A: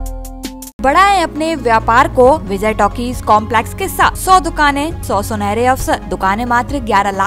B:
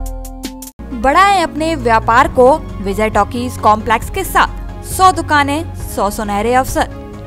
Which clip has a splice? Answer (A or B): A